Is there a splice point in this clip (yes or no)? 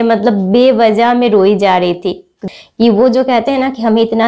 yes